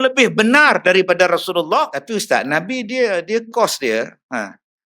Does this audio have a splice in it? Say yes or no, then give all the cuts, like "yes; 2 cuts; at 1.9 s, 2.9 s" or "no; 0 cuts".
yes; 1 cut; at 2.0 s